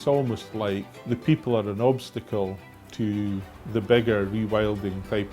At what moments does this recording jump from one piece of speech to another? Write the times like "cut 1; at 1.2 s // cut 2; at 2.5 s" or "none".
cut 1; at 0.9 s // cut 2; at 3.6 s